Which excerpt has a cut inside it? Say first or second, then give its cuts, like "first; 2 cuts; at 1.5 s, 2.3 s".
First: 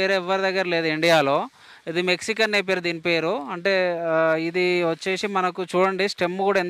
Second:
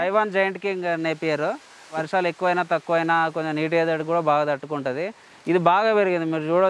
second; 1 cut; at 2.0 s